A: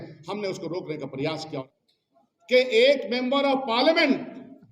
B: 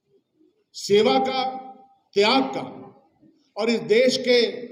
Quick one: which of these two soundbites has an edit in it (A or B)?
A